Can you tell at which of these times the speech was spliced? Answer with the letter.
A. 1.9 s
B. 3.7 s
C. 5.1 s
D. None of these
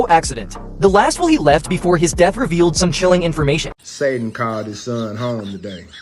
B